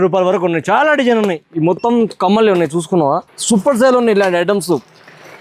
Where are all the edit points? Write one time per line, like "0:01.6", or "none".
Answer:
0:03.3